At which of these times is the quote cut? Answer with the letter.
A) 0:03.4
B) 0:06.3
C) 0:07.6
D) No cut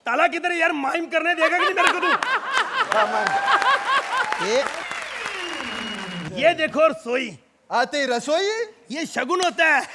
B